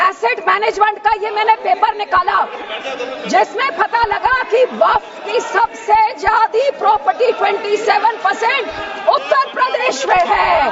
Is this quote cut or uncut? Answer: uncut